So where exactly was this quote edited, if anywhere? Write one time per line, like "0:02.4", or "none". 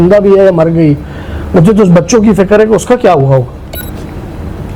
0:03.8